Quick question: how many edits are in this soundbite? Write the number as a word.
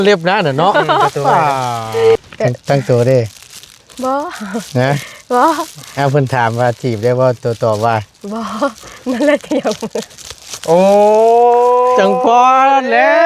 one